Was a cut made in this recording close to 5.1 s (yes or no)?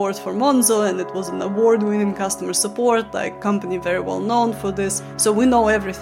yes